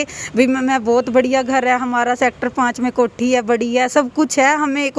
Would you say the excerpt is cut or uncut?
uncut